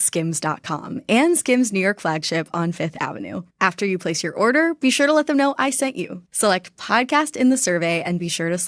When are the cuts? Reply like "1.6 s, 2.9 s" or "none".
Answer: none